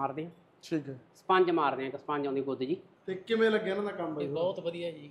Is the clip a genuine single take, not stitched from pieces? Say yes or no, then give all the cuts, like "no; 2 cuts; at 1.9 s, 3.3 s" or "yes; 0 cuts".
no; 1 cut; at 2.9 s